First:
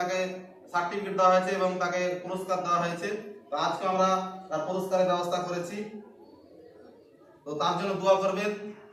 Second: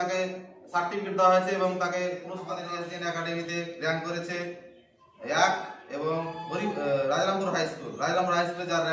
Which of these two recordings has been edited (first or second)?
second